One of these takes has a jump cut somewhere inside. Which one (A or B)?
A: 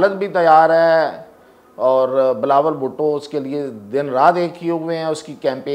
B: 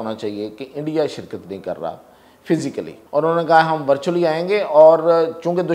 B